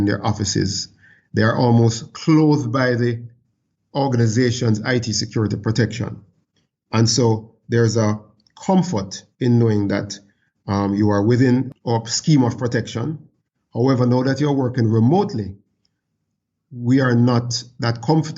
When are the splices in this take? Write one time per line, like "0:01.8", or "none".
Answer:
0:11.7